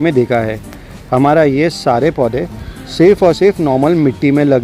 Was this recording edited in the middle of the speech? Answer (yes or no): no